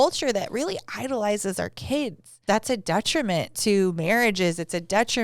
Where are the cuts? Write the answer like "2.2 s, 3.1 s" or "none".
2.4 s